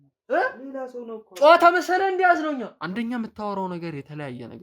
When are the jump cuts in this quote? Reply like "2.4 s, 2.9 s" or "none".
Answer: 2.8 s